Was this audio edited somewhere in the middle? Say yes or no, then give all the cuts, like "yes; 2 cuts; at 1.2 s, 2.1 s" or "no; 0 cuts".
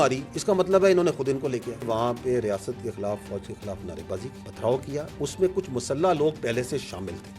yes; 2 cuts; at 1.9 s, 4.4 s